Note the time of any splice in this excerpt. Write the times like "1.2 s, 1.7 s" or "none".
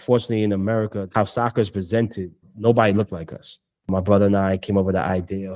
1.0 s, 2.5 s, 3.9 s